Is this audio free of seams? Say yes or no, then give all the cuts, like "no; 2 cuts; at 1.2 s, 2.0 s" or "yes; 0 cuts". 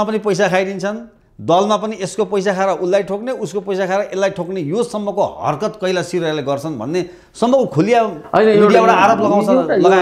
yes; 0 cuts